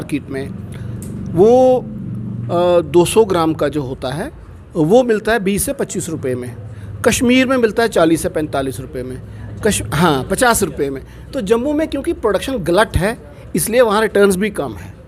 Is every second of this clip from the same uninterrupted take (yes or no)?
yes